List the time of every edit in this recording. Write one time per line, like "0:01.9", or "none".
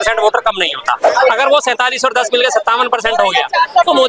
0:01.0